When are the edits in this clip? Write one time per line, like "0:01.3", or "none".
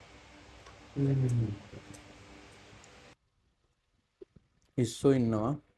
0:03.1